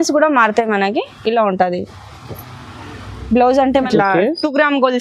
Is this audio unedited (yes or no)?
no